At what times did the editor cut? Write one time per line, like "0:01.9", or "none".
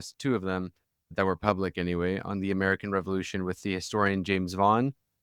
none